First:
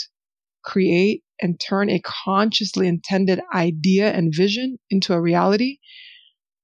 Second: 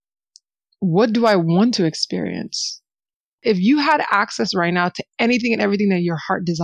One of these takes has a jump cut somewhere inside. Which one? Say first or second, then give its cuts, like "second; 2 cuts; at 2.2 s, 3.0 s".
second; 1 cut; at 3.3 s